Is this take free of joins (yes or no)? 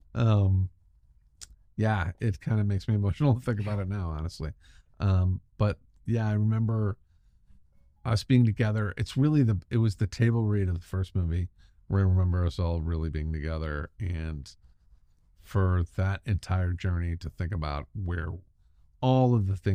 yes